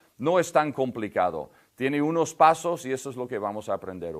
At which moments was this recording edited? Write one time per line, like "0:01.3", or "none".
0:02.8